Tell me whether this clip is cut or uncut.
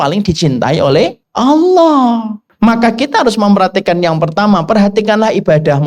cut